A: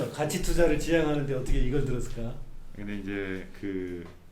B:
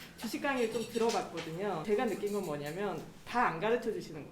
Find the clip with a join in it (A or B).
B